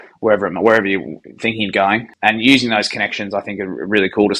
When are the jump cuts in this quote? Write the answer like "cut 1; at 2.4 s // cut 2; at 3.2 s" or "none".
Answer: cut 1; at 2.1 s